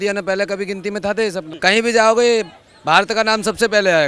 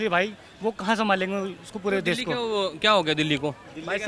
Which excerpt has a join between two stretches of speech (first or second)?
first